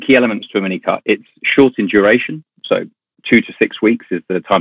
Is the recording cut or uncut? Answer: uncut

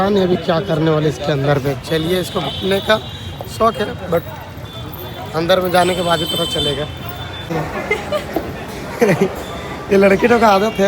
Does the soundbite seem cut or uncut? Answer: cut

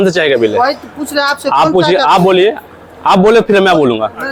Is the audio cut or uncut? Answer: uncut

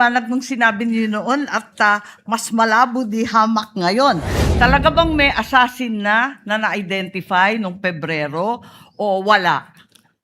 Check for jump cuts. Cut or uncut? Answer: cut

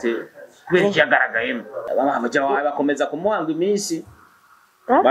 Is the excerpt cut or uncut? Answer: cut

